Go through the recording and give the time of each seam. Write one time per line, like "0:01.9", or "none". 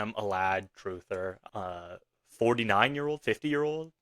0:01.4

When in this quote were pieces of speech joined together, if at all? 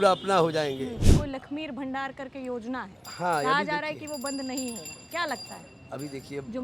0:01.1

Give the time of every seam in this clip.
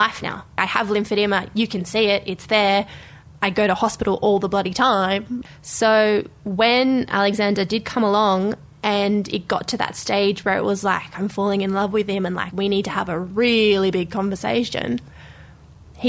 0:05.4

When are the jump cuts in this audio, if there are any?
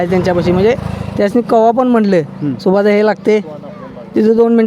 none

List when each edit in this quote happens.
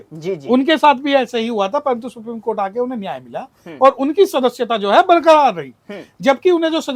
none

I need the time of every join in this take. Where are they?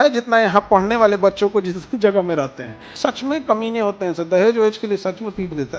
0:02.9

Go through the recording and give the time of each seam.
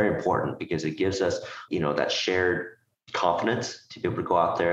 0:01.6

